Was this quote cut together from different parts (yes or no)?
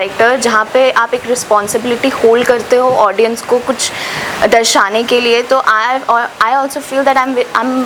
no